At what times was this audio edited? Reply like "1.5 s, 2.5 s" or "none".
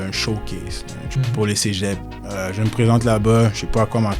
1.0 s, 2.2 s